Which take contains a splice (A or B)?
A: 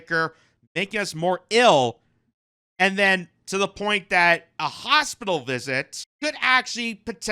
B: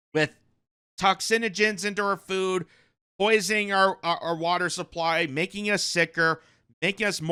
A